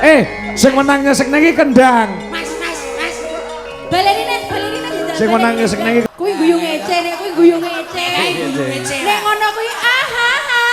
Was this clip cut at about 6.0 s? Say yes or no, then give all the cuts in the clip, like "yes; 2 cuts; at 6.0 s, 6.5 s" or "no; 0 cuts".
yes; 1 cut; at 6.0 s